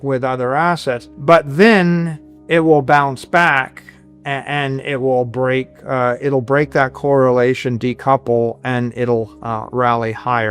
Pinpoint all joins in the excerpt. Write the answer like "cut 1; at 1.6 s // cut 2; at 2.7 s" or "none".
cut 1; at 1.1 s